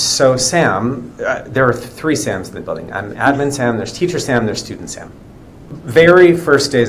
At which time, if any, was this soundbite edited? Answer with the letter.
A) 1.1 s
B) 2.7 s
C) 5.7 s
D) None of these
C